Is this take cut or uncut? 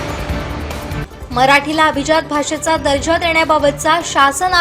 cut